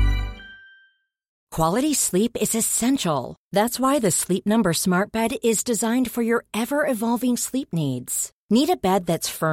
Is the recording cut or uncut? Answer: uncut